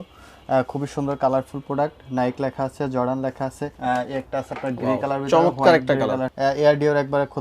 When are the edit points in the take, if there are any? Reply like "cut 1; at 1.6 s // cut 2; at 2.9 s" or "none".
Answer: cut 1; at 3.7 s // cut 2; at 6.3 s